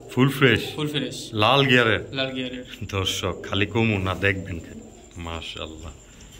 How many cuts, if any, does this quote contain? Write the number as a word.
zero